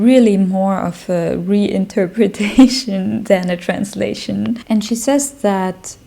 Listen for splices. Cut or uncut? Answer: cut